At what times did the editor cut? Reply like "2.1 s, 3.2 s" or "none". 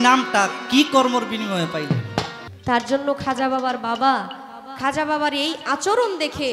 2.4 s